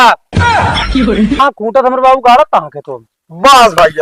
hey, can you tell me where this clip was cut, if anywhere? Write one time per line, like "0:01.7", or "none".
0:01.4